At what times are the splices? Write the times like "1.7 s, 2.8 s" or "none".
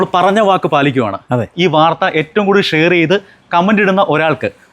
1.5 s